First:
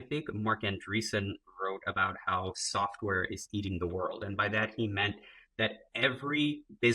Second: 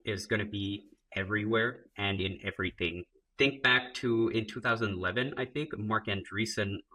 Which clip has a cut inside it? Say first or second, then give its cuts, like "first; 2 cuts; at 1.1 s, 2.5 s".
first; 1 cut; at 4.2 s